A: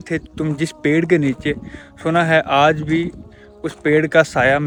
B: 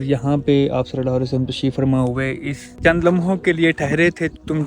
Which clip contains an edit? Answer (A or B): B